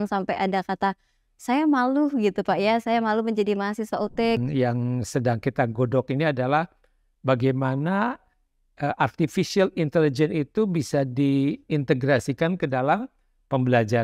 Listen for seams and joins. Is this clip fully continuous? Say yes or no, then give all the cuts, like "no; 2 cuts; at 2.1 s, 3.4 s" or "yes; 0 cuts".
no; 1 cut; at 4.4 s